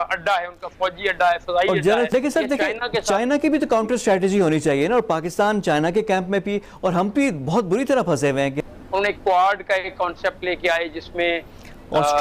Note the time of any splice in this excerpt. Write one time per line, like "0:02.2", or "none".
0:02.1
0:08.7